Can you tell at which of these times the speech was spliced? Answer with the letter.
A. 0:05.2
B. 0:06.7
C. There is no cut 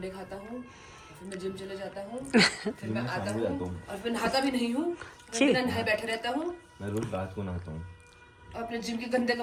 C